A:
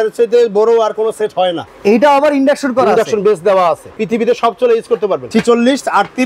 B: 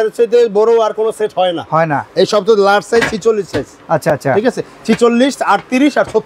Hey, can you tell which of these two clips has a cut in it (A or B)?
A